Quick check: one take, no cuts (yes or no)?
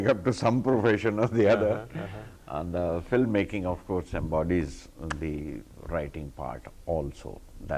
yes